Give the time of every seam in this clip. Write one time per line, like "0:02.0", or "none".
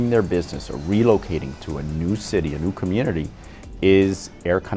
none